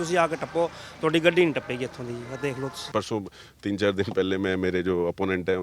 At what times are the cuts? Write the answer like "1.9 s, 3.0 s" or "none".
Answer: 2.9 s